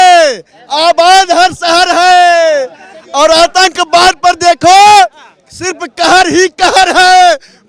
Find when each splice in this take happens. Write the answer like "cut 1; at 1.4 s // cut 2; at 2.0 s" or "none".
none